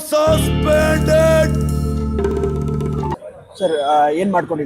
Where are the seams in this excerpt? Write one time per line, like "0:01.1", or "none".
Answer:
0:03.3